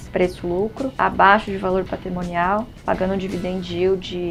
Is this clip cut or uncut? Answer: uncut